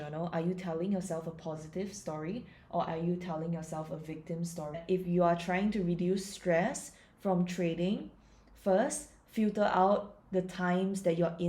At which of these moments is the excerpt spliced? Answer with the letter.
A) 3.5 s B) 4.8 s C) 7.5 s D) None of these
B